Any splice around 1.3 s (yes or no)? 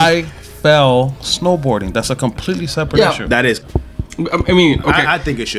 no